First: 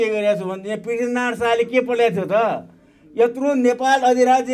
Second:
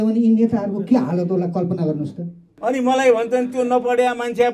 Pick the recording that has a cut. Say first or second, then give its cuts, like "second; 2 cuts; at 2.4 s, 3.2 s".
second; 1 cut; at 2.4 s